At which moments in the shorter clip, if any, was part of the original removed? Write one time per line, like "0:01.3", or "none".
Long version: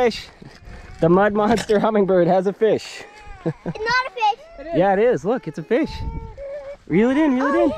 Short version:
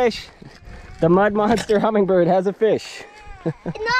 none